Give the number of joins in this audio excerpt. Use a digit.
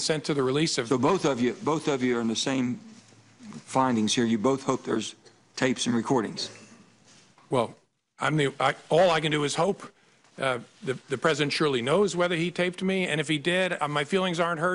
0